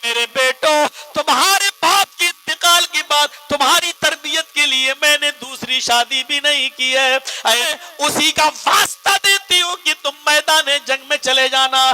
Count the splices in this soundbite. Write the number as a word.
one